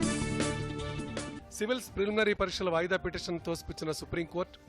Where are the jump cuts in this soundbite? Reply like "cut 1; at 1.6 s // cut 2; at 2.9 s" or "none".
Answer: none